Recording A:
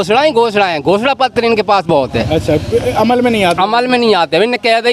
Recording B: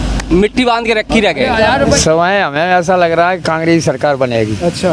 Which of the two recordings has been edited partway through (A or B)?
B